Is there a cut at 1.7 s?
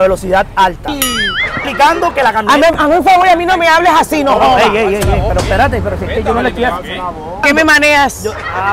yes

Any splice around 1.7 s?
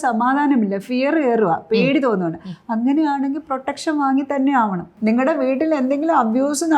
no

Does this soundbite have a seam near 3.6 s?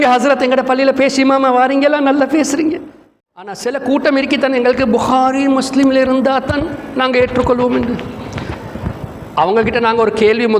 yes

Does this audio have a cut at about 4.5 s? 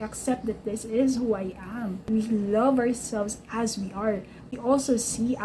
yes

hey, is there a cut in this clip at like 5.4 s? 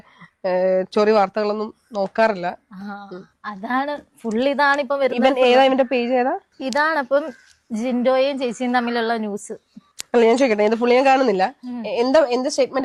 no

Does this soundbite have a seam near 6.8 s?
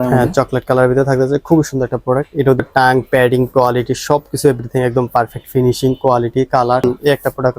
yes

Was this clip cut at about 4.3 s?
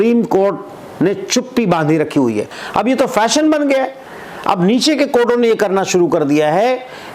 no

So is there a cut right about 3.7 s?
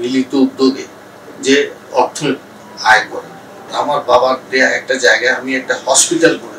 yes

